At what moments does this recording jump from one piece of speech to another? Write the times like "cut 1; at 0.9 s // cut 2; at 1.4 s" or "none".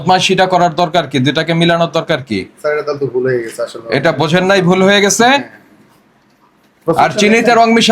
none